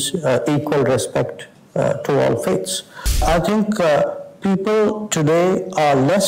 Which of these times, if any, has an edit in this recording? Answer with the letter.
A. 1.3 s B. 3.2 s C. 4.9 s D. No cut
B